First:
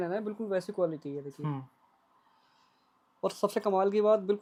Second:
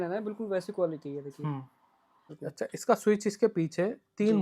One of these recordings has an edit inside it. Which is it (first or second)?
second